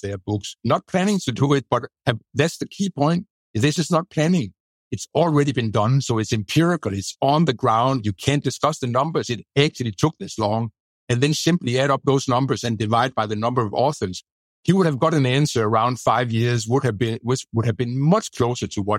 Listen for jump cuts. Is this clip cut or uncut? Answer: uncut